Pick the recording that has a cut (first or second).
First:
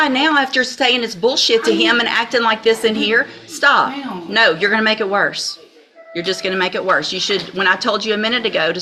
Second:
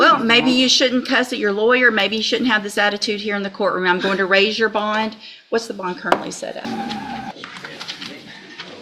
second